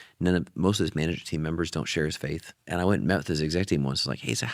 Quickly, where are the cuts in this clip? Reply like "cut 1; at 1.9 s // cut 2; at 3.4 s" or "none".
cut 1; at 2.5 s